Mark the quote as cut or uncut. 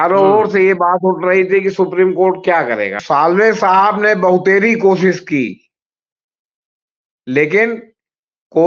cut